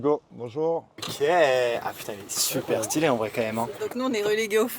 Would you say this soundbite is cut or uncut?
cut